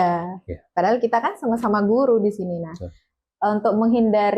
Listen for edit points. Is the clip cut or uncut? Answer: uncut